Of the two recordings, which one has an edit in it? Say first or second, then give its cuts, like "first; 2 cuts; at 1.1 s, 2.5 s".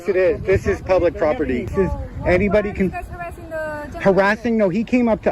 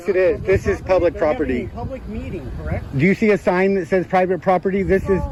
first; 1 cut; at 1.7 s